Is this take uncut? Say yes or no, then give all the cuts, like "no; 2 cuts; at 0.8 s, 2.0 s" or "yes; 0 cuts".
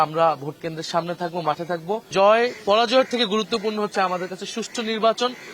no; 1 cut; at 2.1 s